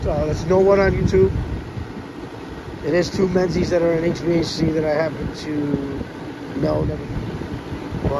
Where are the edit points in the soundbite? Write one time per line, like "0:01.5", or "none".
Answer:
none